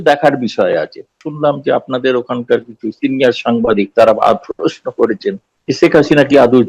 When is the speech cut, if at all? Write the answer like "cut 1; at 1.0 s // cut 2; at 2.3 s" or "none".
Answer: cut 1; at 1.2 s // cut 2; at 5.5 s

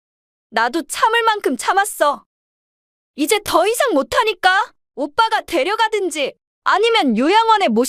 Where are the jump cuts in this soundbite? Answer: cut 1; at 4.8 s // cut 2; at 6.5 s

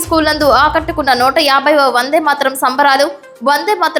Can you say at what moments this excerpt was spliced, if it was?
none

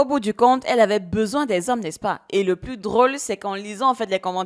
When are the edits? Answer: none

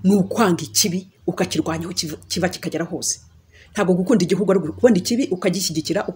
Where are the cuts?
none

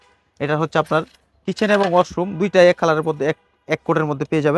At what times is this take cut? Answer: none

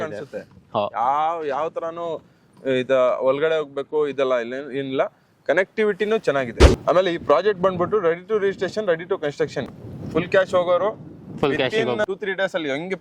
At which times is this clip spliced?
cut 1; at 6.6 s

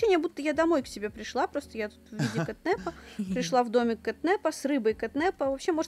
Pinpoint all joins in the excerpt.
none

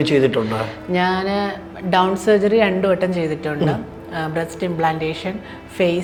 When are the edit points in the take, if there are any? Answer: none

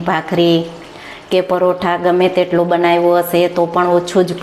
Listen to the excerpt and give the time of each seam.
none

